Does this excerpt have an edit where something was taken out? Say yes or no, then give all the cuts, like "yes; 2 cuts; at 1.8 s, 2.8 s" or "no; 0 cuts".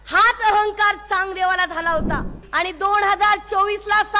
yes; 1 cut; at 2.4 s